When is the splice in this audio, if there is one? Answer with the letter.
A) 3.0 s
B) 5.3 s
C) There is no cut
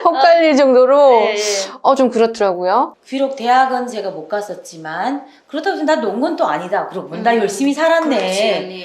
A